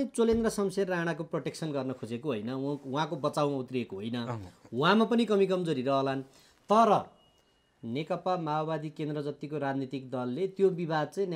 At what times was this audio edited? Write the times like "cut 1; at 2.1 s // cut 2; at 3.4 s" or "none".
none